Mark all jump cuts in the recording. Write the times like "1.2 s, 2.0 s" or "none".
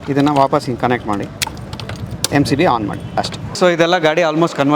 3.4 s

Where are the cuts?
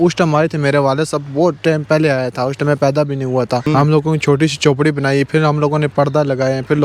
3.6 s

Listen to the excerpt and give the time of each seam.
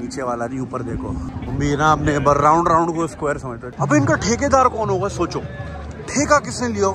1.3 s, 3.6 s

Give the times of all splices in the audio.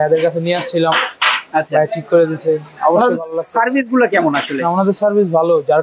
none

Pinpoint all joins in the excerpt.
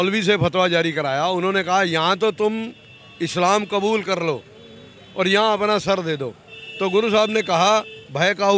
none

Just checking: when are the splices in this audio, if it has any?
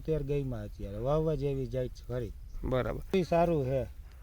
3.1 s

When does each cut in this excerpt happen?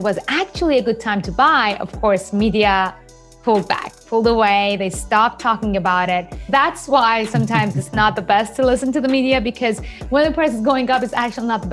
3.3 s, 6.5 s

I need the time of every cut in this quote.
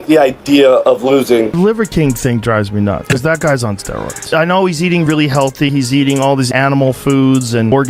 1.5 s

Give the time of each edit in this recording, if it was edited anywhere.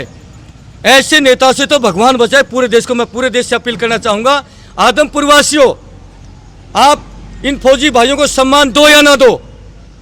none

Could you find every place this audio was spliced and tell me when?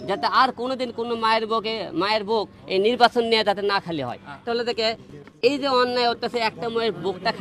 4.4 s

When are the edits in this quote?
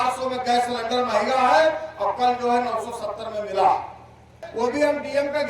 4.4 s

